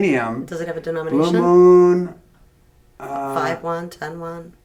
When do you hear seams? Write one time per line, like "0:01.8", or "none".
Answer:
none